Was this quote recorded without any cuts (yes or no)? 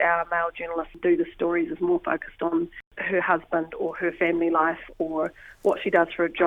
no